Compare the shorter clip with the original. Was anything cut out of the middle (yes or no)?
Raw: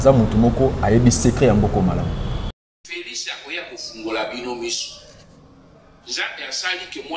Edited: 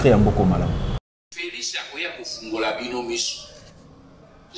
yes